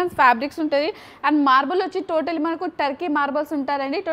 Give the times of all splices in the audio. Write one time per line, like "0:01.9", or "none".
none